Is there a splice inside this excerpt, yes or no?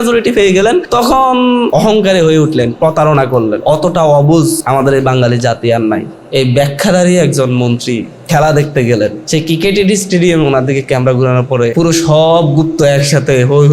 yes